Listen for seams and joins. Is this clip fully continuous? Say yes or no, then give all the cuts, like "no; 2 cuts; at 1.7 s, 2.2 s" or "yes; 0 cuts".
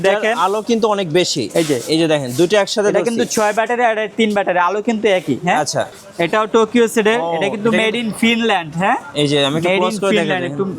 no; 1 cut; at 5.9 s